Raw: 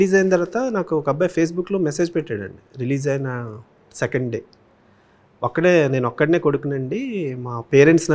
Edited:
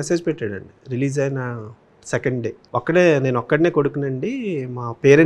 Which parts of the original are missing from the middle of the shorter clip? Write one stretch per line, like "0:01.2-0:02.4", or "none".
0:04.5-0:05.3